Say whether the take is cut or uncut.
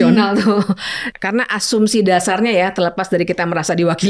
cut